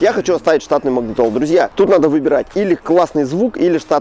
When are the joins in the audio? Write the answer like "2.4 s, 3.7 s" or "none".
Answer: 1.7 s

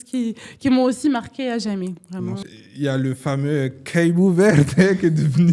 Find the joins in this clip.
2.4 s

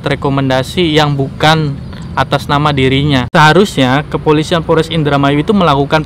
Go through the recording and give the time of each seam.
3.3 s

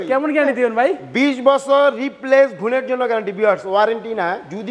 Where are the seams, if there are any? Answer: none

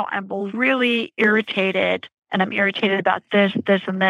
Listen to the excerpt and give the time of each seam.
2.1 s

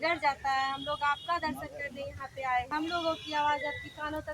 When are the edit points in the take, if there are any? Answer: 2.7 s

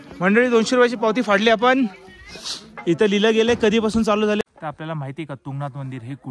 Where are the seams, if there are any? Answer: 4.4 s

